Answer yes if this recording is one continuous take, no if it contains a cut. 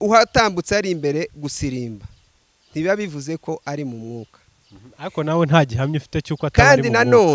yes